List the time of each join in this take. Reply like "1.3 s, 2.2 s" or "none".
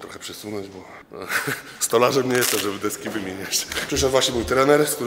1.0 s, 3.7 s